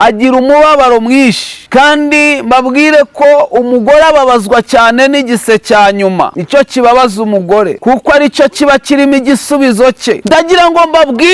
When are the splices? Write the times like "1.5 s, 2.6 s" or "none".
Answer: none